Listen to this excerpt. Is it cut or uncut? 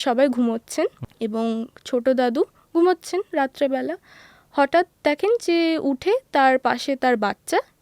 cut